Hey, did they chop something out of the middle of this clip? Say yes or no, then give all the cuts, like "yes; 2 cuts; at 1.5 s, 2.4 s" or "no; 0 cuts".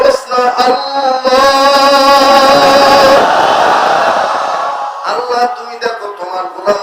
no; 0 cuts